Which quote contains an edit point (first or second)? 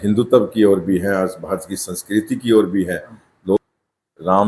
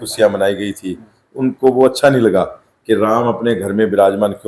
first